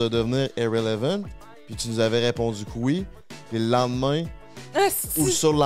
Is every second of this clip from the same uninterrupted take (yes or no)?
yes